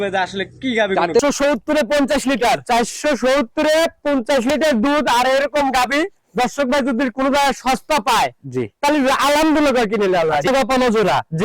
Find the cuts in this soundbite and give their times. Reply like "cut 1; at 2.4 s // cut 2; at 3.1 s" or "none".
cut 1; at 1.2 s // cut 2; at 10.5 s

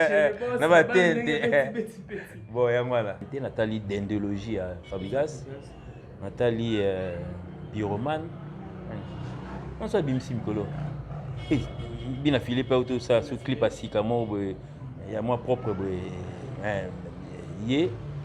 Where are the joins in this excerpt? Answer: cut 1; at 3.3 s

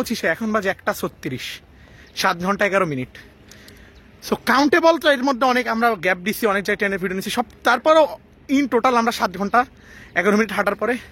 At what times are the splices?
none

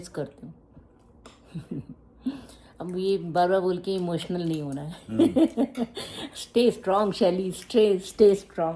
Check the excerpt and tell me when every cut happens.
none

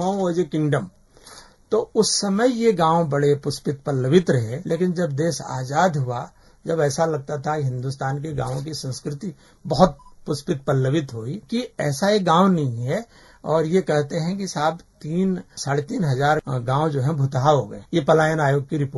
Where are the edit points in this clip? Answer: cut 1; at 4.5 s // cut 2; at 11.4 s // cut 3; at 15.5 s // cut 4; at 16.4 s // cut 5; at 17.8 s

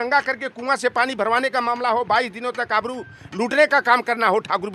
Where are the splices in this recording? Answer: none

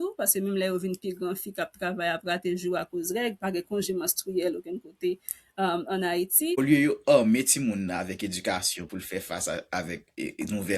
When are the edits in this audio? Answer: cut 1; at 6.6 s

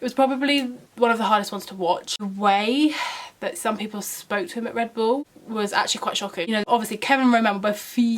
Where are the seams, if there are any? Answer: cut 1; at 2.1 s // cut 2; at 6.7 s

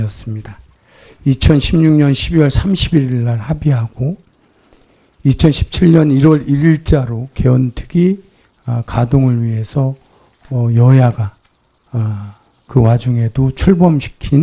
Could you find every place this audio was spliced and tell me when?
none

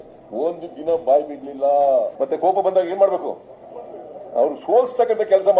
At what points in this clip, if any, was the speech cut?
cut 1; at 2.1 s

